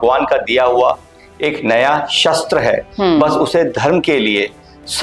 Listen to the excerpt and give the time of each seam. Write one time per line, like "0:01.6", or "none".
none

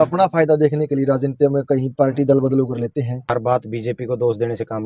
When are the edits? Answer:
0:03.1

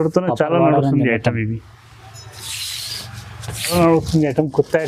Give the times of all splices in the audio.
0:03.7

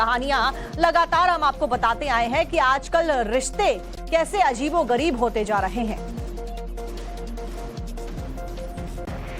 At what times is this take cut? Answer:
0:03.3

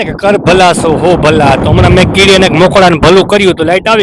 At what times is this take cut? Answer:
none

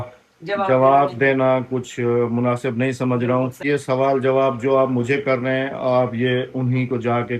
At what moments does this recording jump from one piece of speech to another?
0:03.6

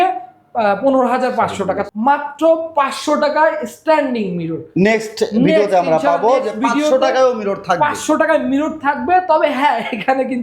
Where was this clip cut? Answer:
0:01.8

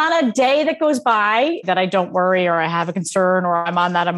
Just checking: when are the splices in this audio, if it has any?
0:01.6

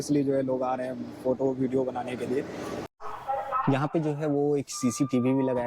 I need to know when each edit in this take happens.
0:02.9

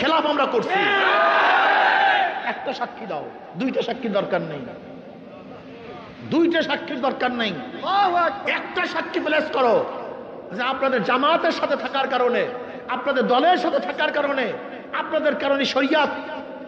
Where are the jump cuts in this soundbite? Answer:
none

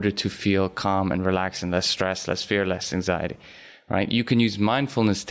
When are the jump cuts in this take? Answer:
none

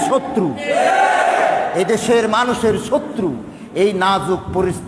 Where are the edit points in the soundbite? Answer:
none

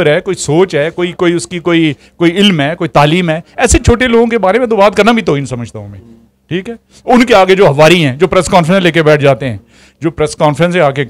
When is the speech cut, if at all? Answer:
none

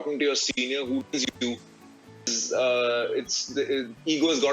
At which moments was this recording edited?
none

